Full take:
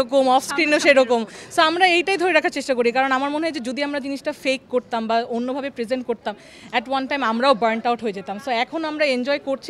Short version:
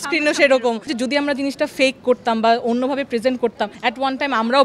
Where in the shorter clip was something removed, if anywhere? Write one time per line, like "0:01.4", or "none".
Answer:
0:00.9
0:03.7